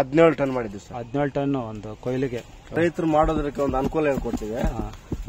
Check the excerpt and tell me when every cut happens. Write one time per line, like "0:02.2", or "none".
0:02.7